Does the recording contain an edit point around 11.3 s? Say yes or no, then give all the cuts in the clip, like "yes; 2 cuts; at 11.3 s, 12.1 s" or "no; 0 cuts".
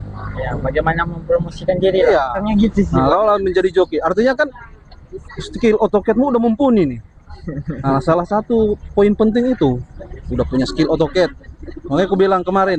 no; 1 cut; at 2.4 s